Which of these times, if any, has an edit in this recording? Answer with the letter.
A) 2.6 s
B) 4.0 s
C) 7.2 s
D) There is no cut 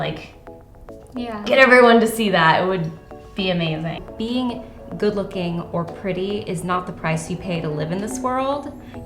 B